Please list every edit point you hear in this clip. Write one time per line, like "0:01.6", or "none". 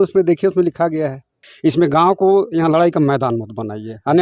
0:01.4